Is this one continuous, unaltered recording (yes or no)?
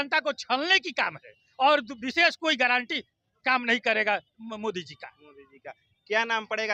yes